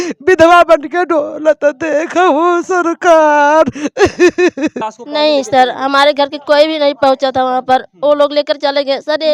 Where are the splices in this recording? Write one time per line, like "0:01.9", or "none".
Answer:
0:04.8